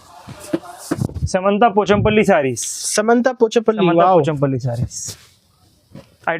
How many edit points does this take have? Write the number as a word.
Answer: one